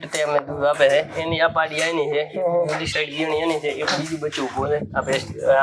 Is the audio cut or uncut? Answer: uncut